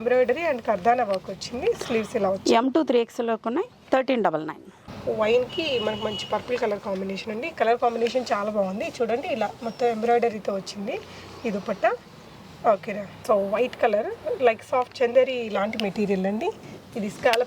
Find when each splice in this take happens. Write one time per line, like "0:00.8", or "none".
none